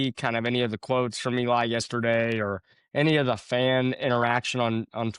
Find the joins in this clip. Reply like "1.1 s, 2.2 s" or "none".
none

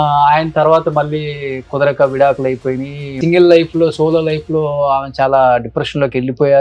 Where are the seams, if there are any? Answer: 3.2 s

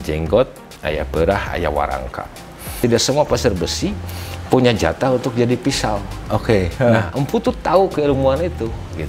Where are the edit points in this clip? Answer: 2.7 s

